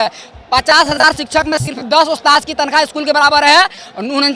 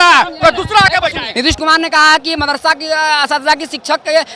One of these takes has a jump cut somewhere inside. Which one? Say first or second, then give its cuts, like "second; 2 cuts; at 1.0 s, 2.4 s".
second; 1 cut; at 1.3 s